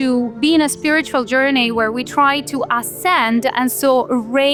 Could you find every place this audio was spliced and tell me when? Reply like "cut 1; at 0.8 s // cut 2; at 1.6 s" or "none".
none

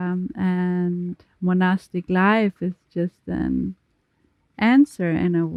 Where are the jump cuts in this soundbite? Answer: none

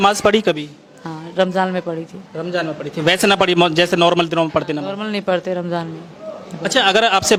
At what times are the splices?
none

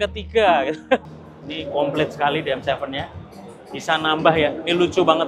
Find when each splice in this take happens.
cut 1; at 1.1 s

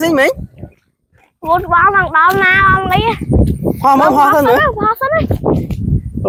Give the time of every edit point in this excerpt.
none

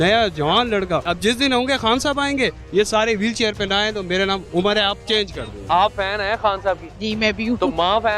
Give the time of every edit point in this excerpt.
cut 1; at 1.1 s // cut 2; at 5.6 s

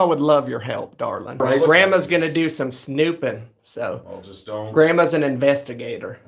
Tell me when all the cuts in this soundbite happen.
cut 1; at 1.4 s

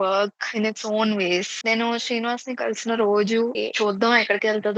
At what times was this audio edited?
cut 1; at 1.6 s // cut 2; at 3.6 s

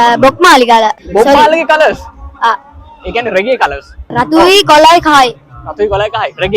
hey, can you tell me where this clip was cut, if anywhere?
cut 1; at 1.0 s // cut 2; at 4.1 s

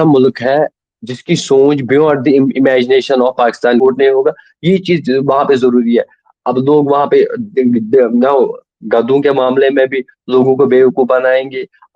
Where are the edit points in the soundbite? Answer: cut 1; at 3.8 s

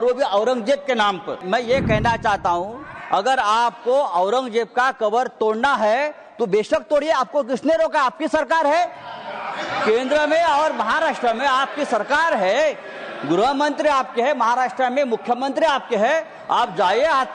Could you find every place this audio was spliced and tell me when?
cut 1; at 1.4 s

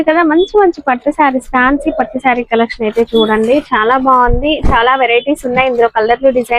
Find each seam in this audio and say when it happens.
none

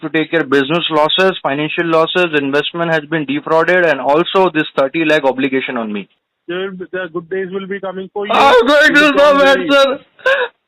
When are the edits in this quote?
cut 1; at 6.3 s

